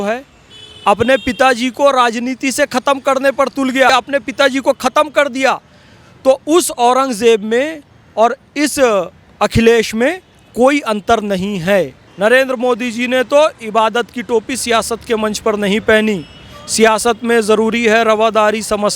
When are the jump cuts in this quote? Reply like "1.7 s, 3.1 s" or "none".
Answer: 12.0 s